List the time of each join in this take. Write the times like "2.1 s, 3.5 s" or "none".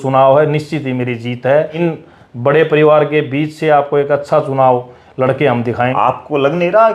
1.7 s, 5.9 s

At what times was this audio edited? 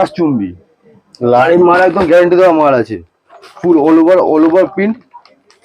1.4 s

